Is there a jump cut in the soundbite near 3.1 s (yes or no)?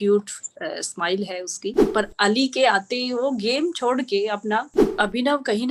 no